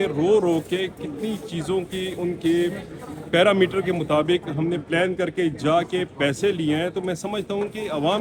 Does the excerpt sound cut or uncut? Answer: uncut